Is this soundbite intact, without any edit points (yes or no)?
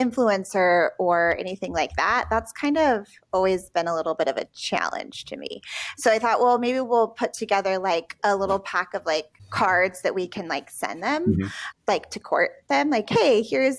no